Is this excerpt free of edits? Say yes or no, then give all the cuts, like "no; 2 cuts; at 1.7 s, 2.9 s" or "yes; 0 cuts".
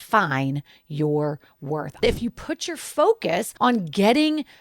no; 2 cuts; at 2.0 s, 3.5 s